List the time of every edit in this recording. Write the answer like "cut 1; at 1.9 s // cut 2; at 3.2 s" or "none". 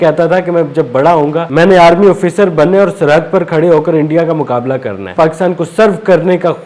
cut 1; at 1.4 s // cut 2; at 5.1 s